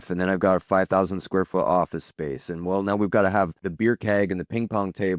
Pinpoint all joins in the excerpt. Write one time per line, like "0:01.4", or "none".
0:03.6

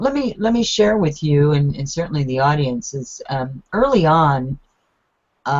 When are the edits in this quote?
none

